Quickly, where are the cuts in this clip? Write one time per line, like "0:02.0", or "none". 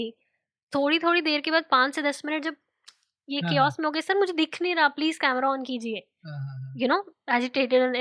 none

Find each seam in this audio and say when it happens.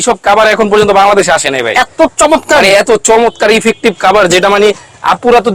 none

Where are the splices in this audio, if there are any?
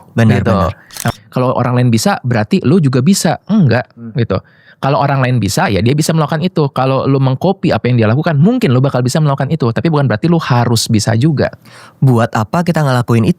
0:01.1

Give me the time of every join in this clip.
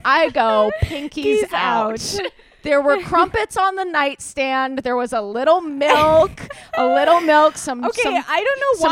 0:02.5

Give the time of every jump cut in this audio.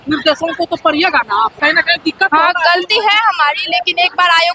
0:01.6

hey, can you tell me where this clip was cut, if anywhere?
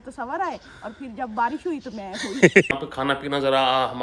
0:02.7

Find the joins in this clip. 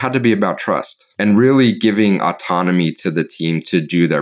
0:01.0

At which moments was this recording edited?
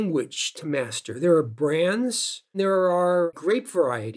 0:02.5
0:03.3

